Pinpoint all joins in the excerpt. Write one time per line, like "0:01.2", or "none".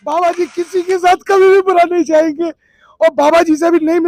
none